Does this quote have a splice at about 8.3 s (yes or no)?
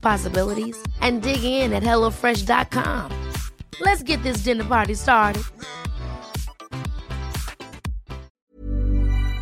yes